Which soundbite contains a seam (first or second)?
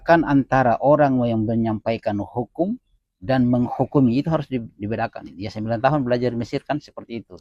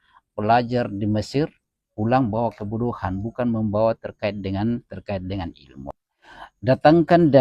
second